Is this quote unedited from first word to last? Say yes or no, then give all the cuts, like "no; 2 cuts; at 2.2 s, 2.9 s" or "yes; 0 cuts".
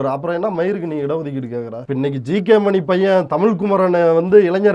no; 1 cut; at 1.8 s